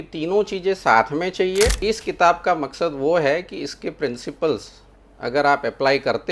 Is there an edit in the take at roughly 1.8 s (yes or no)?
yes